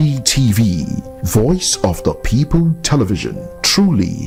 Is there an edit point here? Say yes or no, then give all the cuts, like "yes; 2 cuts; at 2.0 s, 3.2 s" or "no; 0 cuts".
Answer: no; 0 cuts